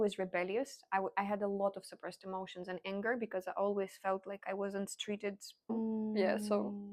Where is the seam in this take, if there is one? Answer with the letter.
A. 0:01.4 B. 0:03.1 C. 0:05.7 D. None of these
C